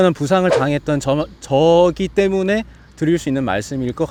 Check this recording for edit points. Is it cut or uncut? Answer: uncut